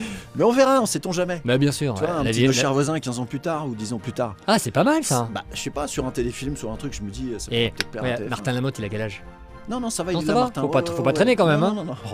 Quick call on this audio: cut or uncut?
uncut